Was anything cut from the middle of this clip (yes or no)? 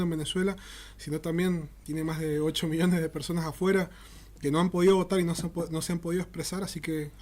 yes